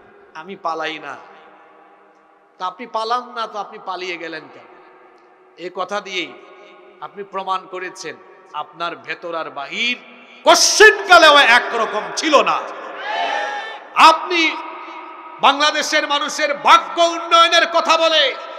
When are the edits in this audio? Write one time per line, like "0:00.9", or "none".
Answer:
none